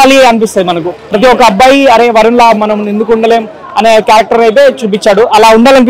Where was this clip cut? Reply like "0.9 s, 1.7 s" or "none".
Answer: none